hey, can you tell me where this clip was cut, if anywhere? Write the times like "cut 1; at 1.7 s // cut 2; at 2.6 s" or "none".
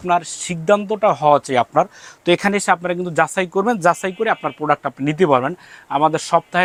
none